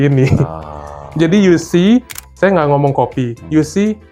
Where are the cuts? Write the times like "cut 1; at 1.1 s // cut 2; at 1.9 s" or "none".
cut 1; at 2.2 s